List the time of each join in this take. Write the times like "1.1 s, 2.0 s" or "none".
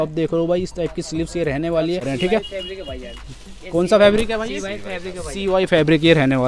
2.1 s